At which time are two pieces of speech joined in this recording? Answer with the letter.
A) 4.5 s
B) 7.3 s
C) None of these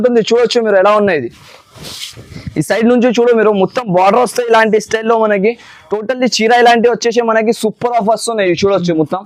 C